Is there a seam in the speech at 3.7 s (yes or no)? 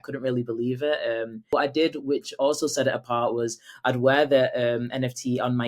no